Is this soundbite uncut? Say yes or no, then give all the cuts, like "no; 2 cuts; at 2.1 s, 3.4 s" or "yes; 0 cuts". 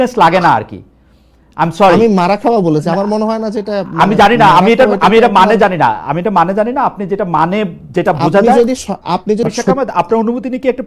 no; 1 cut; at 9.4 s